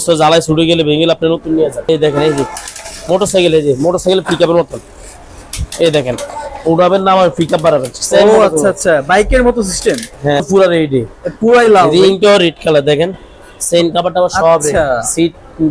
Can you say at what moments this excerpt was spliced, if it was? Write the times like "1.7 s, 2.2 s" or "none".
1.9 s, 10.4 s

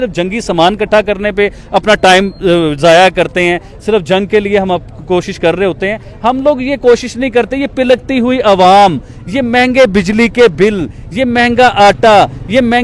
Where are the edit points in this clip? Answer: none

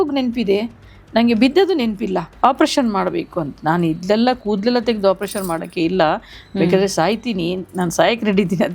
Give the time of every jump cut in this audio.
2.3 s

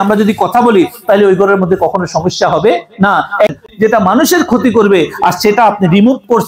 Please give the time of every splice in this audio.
3.6 s

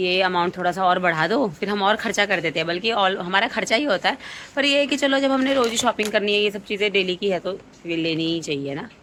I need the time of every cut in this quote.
none

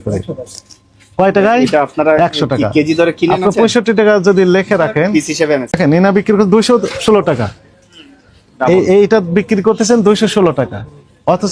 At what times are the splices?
5.8 s

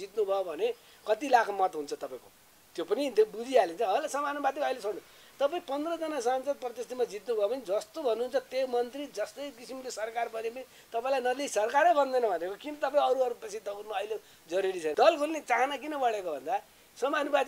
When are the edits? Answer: 14.9 s

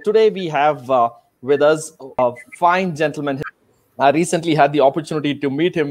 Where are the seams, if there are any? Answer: 2.1 s, 3.4 s

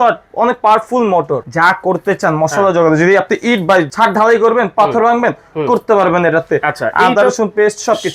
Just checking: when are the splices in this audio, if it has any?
1.4 s

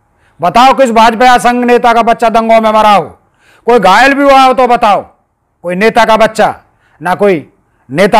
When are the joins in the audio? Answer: none

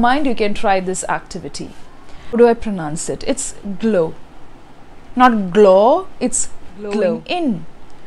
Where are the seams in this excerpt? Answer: 2.3 s, 7.2 s

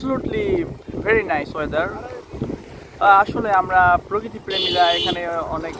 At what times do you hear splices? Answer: none

